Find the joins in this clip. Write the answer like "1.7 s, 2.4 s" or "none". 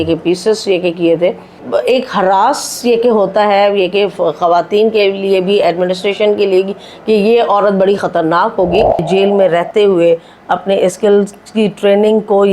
1.6 s, 9.0 s